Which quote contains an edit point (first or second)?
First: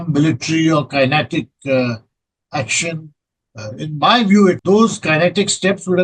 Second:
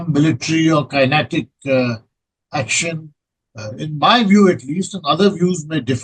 first